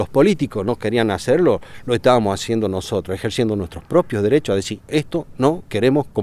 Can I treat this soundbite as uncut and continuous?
yes; 0 cuts

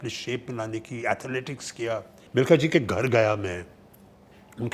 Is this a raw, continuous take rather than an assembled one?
no; 1 cut; at 2.2 s

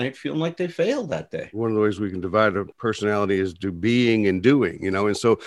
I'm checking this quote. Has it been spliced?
yes; 2 cuts; at 1.4 s, 2.7 s

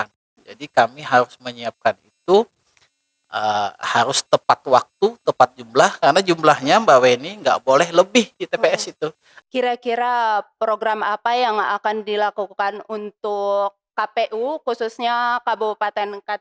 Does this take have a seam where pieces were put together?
yes; 1 cut; at 9.3 s

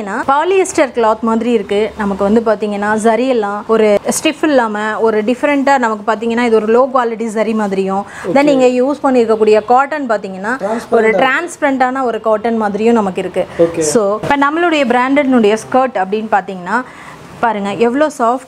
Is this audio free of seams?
yes; 0 cuts

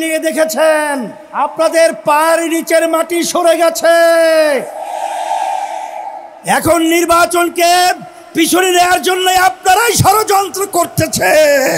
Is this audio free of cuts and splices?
no; 1 cut; at 1.2 s

